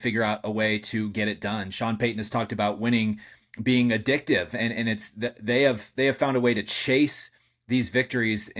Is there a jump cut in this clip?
no; 0 cuts

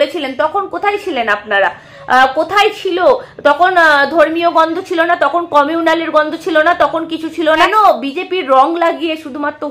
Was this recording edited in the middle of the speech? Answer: yes; 1 cut; at 7.6 s

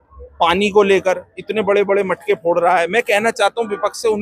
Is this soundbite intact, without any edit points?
yes; 0 cuts

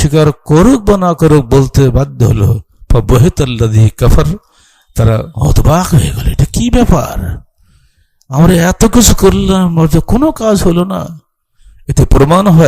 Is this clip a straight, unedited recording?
yes; 0 cuts

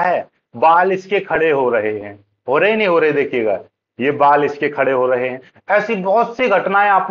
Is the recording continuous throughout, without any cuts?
yes; 0 cuts

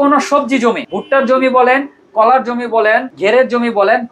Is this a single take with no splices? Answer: no; 2 cuts; at 0.9 s, 3.1 s

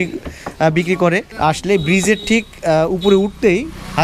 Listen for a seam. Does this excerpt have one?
yes; 1 cut; at 1.3 s

